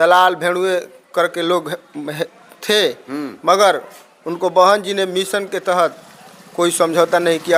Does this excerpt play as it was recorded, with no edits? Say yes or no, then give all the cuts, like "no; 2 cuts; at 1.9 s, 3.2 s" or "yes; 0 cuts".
yes; 0 cuts